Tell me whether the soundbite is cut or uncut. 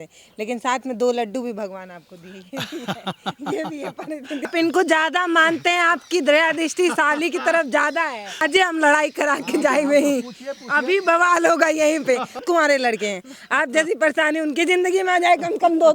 cut